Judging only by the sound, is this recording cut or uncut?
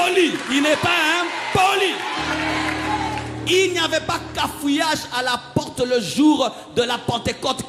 uncut